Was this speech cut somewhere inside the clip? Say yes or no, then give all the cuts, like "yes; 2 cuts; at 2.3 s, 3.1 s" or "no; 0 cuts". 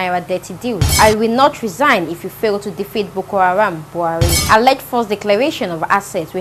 yes; 2 cuts; at 0.9 s, 4.4 s